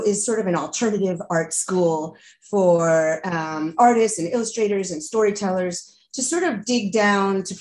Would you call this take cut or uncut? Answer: uncut